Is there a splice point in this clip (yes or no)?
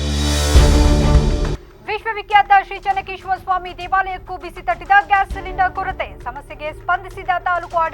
yes